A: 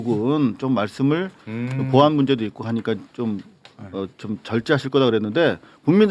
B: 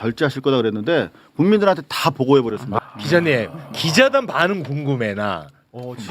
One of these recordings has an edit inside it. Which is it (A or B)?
B